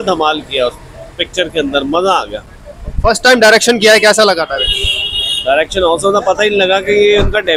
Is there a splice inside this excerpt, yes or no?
no